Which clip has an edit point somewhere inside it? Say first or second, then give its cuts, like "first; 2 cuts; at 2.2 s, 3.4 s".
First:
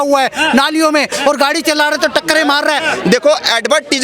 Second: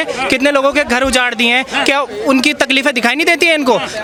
first; 1 cut; at 2.9 s